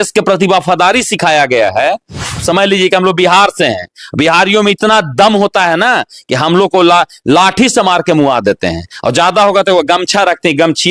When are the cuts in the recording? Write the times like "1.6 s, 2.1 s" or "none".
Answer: 2.4 s